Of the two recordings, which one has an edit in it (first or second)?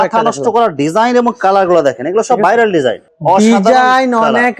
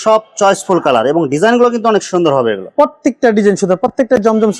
first